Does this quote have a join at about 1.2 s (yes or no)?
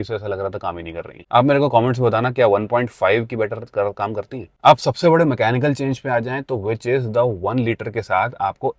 no